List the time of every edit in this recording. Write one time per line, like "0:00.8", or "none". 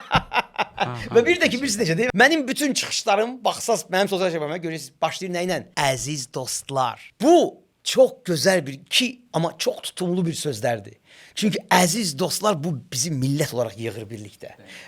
0:02.1
0:05.7
0:07.1